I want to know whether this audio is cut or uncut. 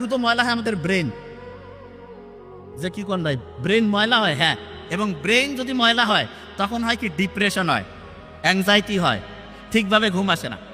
uncut